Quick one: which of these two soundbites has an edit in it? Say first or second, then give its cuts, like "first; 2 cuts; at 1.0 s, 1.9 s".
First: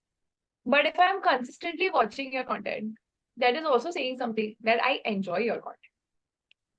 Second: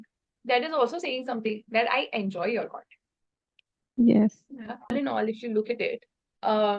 second; 1 cut; at 4.9 s